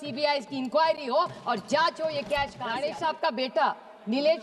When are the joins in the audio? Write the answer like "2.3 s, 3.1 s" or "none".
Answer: 2.7 s

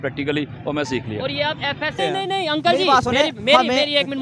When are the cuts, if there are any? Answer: 2.0 s

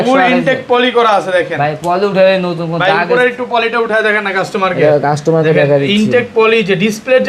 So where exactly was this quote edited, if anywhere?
none

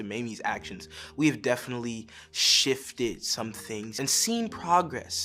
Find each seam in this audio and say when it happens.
4.0 s

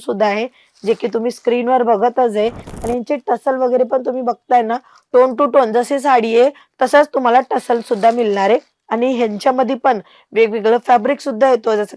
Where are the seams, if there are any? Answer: 2.7 s

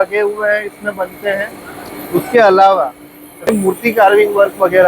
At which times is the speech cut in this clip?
3.5 s

